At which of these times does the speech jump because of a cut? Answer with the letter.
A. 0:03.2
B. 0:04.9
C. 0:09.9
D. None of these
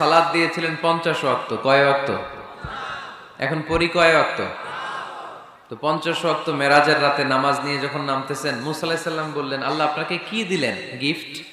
D